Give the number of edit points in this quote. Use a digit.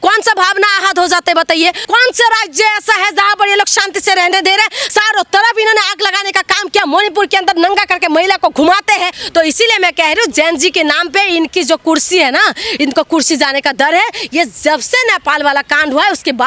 2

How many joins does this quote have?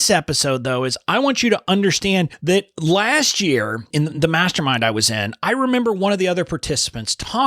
2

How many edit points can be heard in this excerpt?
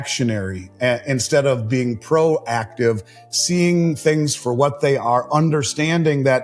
0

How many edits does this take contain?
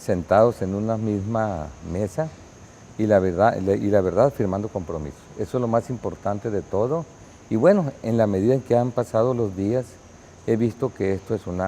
1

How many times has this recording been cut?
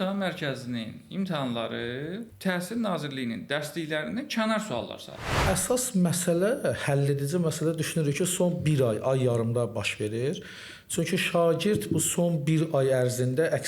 2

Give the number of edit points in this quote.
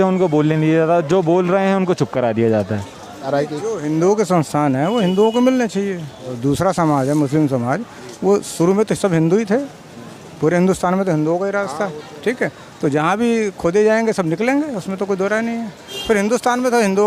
3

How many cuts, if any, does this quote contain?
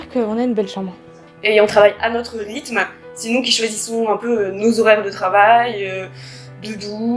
1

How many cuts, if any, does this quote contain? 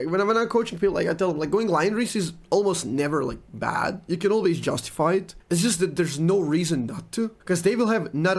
2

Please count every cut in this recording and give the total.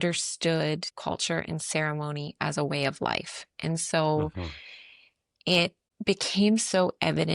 1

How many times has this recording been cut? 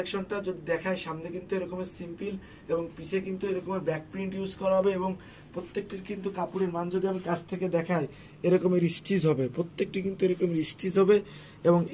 0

